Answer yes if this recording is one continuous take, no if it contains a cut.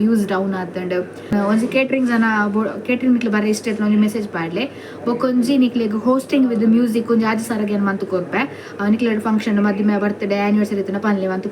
no